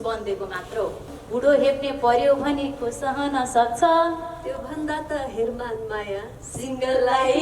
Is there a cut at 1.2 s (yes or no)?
yes